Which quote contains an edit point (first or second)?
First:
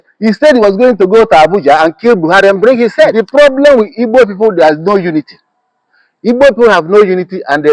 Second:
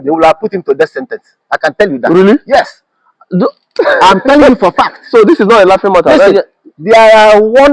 first